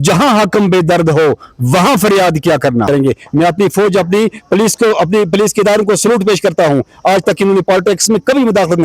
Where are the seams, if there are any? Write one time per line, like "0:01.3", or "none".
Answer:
0:02.9